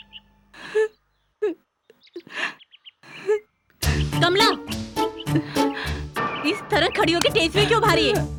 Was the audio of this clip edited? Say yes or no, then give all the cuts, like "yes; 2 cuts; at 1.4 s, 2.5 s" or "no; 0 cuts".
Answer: no; 0 cuts